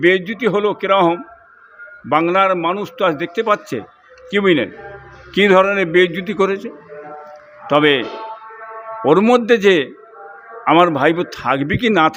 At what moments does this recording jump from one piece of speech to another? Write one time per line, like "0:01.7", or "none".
none